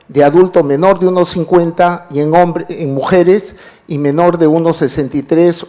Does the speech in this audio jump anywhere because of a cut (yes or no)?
yes